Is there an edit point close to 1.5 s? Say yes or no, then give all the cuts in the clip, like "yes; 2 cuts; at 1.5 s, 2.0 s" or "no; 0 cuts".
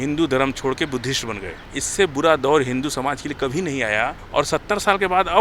yes; 2 cuts; at 1.5 s, 4.2 s